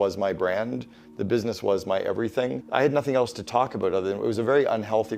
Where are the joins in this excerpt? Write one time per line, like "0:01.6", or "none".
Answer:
0:02.6

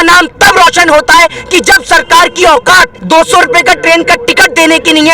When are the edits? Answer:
0:03.0

